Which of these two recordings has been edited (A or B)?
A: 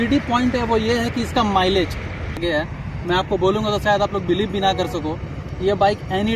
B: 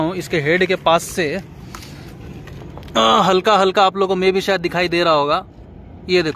A